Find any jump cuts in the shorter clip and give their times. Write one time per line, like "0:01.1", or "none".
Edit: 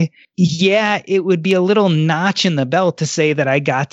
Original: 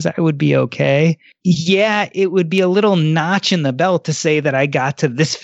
none